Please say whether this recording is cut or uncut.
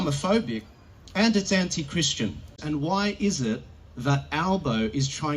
cut